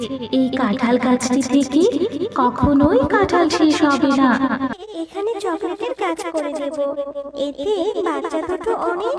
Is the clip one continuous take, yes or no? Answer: no